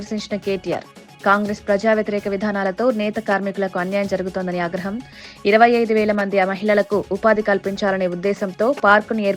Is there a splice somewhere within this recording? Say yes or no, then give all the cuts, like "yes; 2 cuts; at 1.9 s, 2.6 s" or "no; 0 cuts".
no; 0 cuts